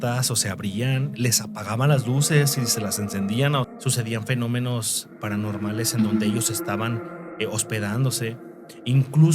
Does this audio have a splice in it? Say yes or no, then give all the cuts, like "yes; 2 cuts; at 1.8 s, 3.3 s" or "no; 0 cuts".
yes; 1 cut; at 3.7 s